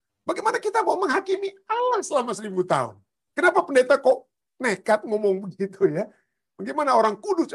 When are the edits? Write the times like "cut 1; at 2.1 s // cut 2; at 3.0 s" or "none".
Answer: none